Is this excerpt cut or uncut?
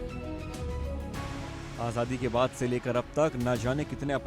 cut